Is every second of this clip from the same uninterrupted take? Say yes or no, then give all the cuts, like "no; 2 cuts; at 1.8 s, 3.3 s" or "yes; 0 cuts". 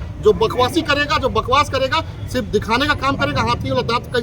yes; 0 cuts